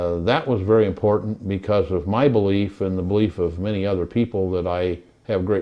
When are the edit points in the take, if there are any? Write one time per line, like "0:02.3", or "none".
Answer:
none